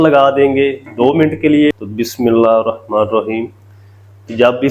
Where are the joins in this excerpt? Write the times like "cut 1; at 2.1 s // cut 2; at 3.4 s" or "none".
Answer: cut 1; at 1.8 s